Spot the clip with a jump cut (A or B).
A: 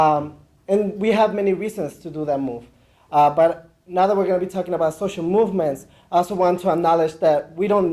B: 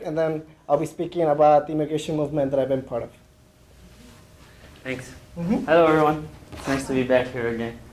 B